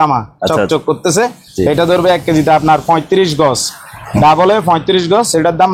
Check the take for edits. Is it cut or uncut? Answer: uncut